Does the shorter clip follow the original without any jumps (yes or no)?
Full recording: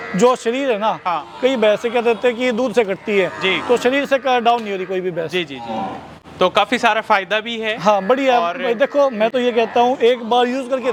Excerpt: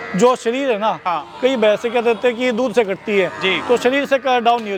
yes